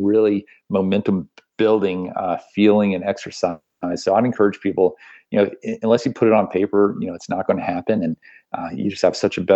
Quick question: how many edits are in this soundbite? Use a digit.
0